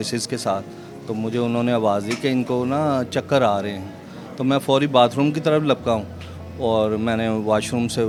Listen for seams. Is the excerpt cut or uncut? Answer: uncut